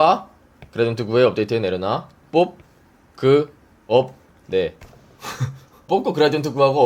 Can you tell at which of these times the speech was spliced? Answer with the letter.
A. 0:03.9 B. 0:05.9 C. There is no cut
B